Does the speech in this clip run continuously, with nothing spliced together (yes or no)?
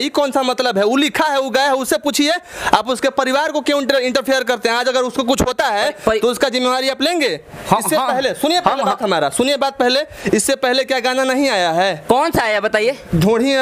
yes